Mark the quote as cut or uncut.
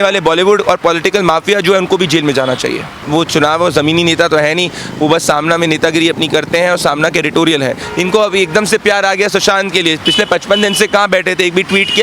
cut